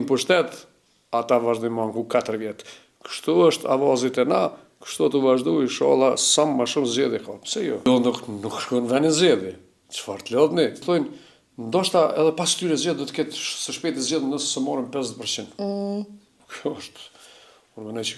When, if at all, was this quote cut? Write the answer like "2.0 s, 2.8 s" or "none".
7.8 s, 10.8 s